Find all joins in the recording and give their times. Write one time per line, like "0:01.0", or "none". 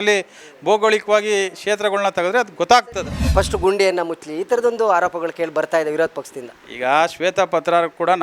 0:03.2

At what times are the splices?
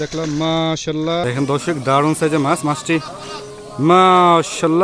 0:01.2

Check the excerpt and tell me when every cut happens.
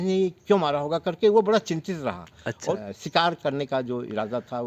0:02.7

